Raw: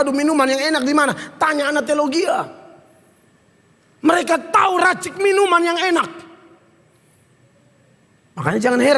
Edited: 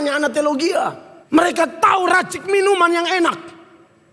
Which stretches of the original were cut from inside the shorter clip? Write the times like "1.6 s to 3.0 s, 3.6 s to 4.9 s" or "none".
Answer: 2.6 s to 3.8 s